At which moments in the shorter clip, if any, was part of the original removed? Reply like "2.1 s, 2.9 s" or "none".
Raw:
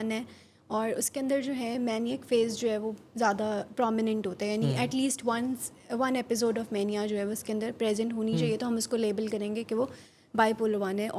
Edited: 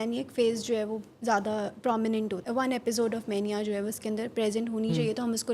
2.4 s